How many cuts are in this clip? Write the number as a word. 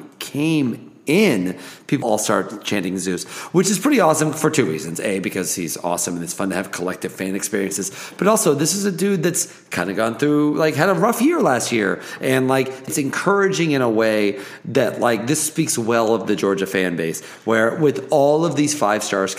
two